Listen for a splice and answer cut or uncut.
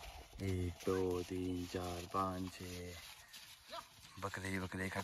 uncut